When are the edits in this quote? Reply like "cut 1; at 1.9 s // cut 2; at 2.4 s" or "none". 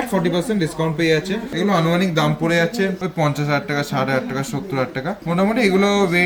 cut 1; at 1.5 s // cut 2; at 3.0 s // cut 3; at 5.2 s